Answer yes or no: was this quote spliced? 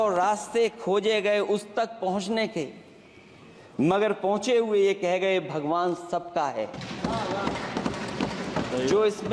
no